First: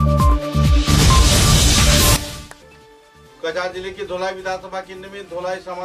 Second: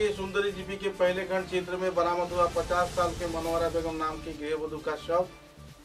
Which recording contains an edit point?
first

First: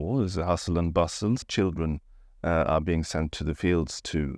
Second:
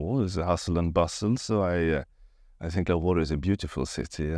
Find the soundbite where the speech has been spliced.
first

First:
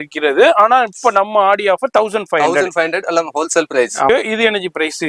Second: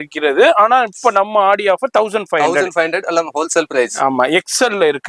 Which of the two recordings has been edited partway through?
first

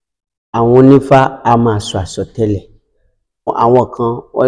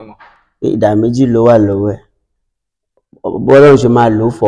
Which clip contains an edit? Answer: first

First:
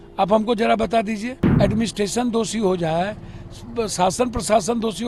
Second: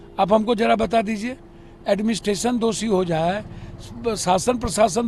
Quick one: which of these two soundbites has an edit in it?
first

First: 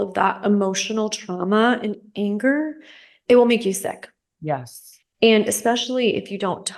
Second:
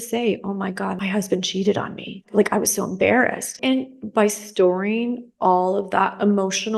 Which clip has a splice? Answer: second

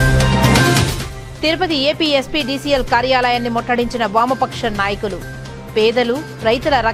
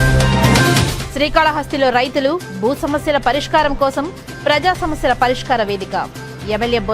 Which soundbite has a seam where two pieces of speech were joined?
second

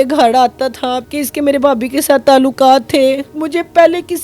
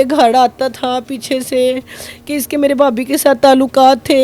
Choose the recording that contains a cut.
first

